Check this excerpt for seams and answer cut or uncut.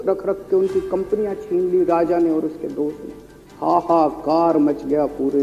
uncut